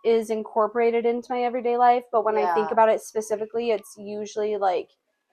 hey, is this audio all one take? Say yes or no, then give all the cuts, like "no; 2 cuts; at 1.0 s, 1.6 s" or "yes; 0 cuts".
yes; 0 cuts